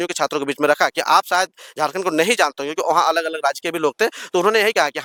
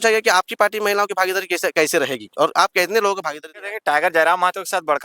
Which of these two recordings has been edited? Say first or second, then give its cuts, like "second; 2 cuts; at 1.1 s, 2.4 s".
second; 1 cut; at 3.7 s